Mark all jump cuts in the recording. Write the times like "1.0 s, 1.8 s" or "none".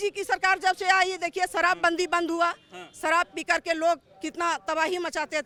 none

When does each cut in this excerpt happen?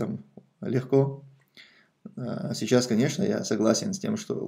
none

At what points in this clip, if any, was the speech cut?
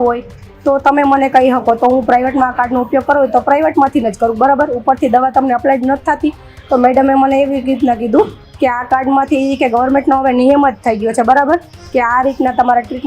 none

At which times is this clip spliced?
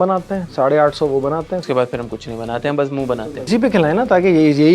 1.6 s, 3.5 s

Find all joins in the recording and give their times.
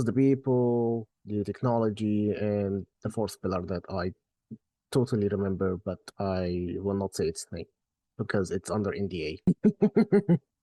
9.4 s

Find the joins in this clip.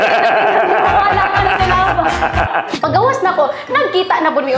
2.7 s

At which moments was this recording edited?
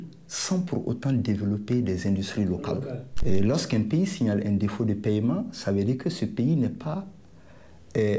3.0 s

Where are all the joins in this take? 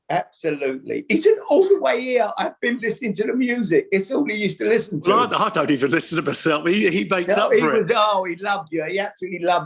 2.8 s, 5.0 s

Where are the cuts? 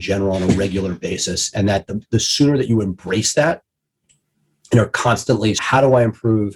5.6 s

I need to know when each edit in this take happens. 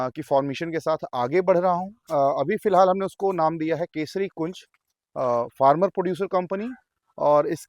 1.9 s

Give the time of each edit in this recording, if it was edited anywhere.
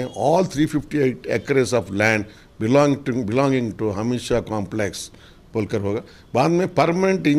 none

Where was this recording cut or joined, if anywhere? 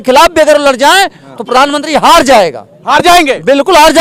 none

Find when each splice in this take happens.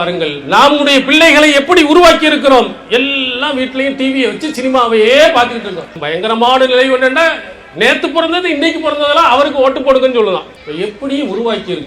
6.0 s, 10.6 s

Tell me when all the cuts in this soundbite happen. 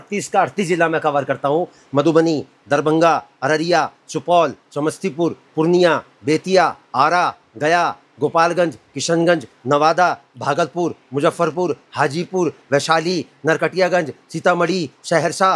none

